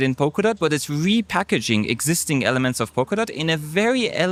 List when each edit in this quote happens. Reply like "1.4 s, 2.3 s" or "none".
none